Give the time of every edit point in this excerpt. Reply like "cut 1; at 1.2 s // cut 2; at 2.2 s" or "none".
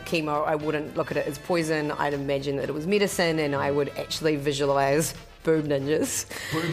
none